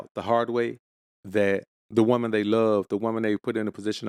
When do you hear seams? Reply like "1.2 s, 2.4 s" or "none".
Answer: none